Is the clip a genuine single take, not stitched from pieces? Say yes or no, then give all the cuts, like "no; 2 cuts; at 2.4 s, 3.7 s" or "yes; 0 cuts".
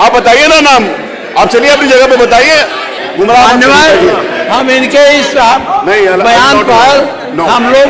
no; 1 cut; at 3.0 s